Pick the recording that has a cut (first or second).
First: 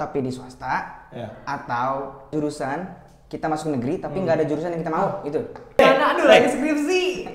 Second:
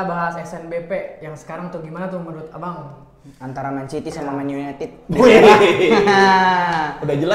first